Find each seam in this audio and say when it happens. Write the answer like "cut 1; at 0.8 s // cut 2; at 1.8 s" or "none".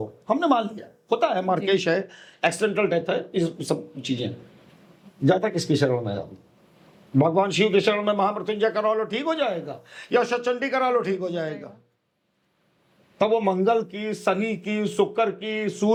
none